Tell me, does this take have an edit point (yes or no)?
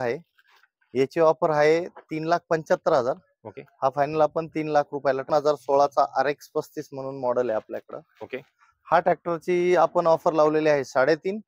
yes